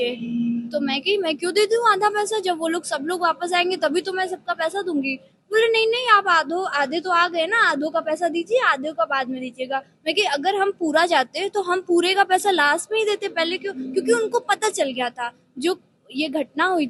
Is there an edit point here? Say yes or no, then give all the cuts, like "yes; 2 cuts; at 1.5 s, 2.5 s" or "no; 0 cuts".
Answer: no; 0 cuts